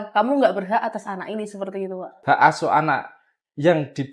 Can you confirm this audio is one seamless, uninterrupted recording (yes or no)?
no